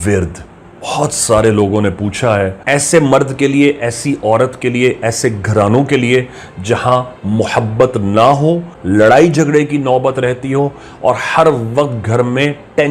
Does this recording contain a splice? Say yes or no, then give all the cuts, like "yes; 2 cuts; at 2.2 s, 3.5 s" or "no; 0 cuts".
yes; 2 cuts; at 2.6 s, 8.7 s